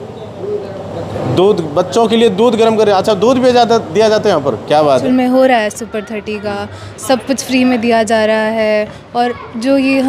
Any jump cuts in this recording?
yes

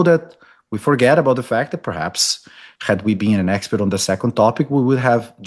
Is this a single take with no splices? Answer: yes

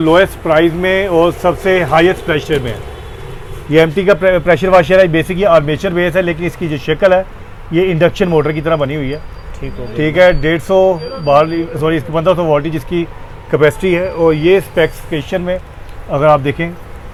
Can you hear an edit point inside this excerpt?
no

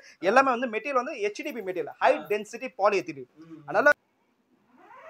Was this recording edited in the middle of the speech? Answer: yes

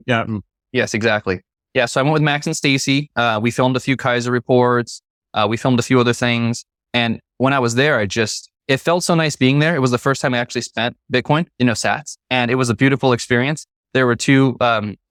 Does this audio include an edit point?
no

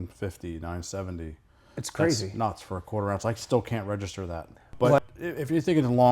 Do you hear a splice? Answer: yes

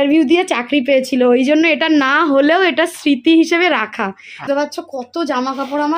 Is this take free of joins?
no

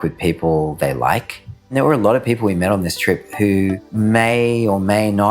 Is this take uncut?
no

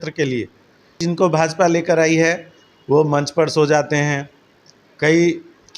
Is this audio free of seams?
no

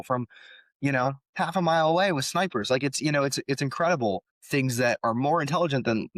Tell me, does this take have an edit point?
yes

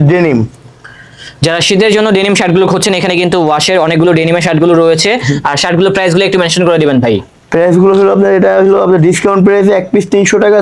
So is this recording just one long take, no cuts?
yes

